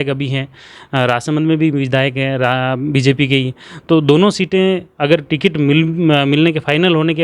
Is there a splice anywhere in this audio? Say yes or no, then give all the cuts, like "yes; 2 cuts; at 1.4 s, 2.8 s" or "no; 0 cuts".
no; 0 cuts